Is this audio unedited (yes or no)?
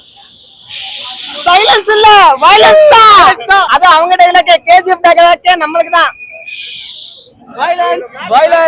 yes